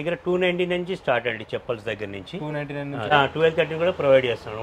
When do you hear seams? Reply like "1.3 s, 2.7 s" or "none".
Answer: 3.1 s